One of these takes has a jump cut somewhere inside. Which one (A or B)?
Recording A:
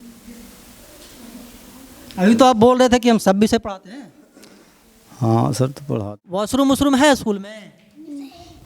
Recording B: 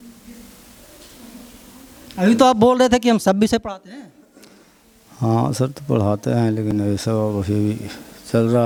A